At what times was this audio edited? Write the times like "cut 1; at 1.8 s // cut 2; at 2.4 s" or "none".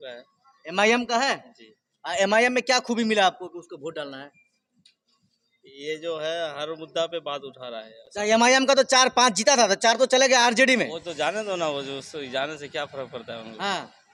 none

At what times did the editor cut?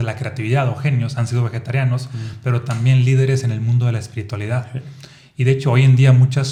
none

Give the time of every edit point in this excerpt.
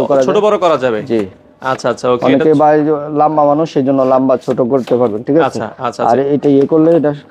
none

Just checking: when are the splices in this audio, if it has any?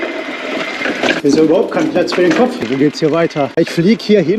cut 1; at 1.2 s // cut 2; at 2.7 s // cut 3; at 3.6 s

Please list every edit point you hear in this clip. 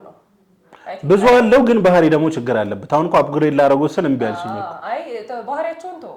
none

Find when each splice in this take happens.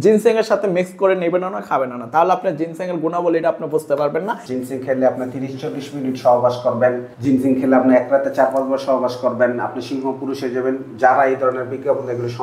cut 1; at 4.4 s

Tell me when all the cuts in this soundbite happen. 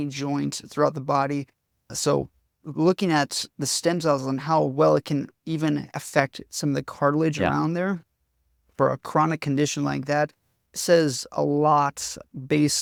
none

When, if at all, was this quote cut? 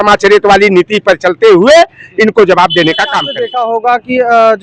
cut 1; at 3.3 s

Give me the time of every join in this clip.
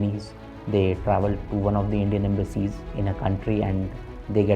cut 1; at 2.9 s

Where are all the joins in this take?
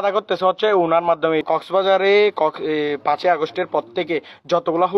cut 1; at 1.4 s

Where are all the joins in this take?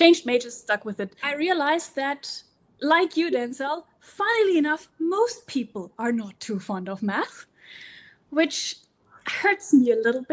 cut 1; at 1.2 s

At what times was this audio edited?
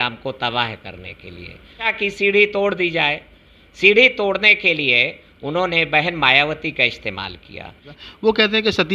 cut 1; at 1.9 s // cut 2; at 7.9 s

